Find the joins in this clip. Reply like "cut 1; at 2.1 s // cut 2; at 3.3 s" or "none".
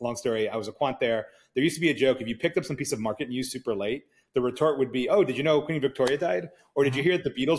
none